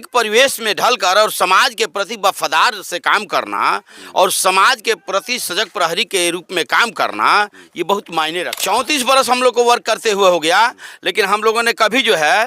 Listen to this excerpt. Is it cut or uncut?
cut